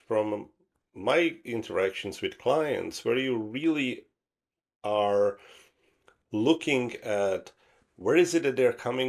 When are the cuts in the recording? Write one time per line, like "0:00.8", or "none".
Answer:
none

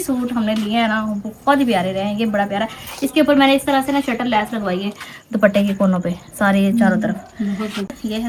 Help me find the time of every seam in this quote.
none

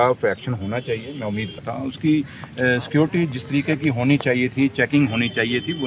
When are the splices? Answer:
0:01.6

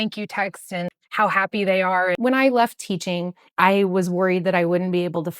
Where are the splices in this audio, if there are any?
0:01.0
0:02.2

